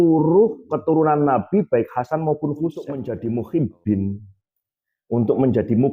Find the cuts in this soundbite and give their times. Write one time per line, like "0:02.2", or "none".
0:03.1